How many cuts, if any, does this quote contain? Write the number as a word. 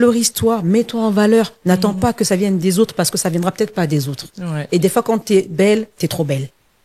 zero